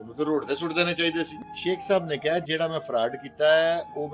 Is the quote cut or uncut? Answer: cut